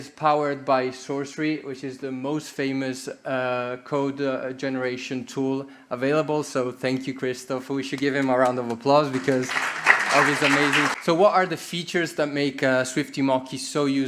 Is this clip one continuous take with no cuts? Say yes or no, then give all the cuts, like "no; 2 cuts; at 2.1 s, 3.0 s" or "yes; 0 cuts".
no; 1 cut; at 10.9 s